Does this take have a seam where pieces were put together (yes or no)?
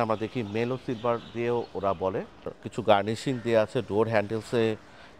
yes